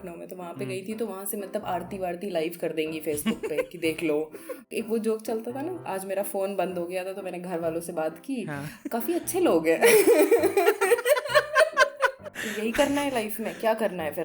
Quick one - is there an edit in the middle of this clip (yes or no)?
yes